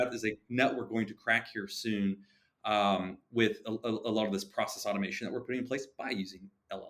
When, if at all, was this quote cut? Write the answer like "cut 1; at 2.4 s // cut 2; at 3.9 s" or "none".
none

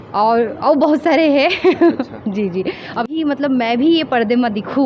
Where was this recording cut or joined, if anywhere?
cut 1; at 3.1 s

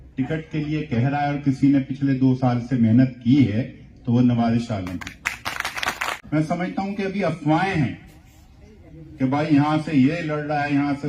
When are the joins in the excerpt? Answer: cut 1; at 6.1 s

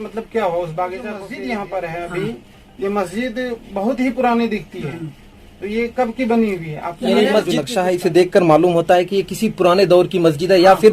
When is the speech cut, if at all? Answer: cut 1; at 1.3 s // cut 2; at 7.6 s

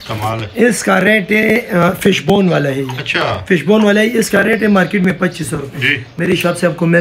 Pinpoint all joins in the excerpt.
none

